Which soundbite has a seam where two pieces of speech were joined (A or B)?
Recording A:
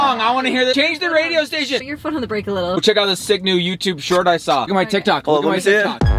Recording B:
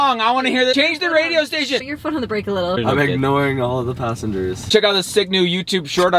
B